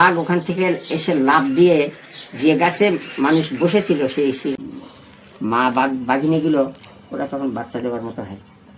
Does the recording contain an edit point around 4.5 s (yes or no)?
yes